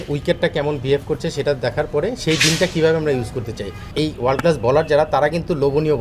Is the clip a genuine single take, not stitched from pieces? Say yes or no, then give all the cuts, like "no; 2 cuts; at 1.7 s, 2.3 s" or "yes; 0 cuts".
no; 1 cut; at 3.8 s